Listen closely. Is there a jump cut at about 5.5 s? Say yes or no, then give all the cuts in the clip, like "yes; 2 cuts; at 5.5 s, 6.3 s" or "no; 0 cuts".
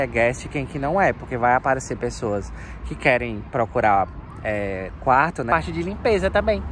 yes; 1 cut; at 5.5 s